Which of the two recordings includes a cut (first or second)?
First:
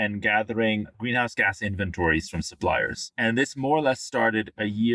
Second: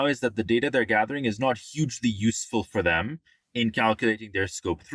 first